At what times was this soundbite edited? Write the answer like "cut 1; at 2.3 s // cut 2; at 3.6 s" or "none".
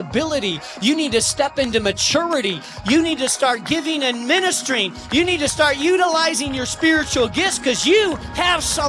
none